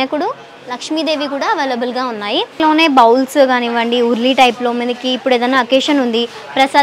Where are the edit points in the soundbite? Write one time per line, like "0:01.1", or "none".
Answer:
0:02.6